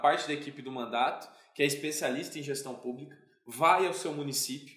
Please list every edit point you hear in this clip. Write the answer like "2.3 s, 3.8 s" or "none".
none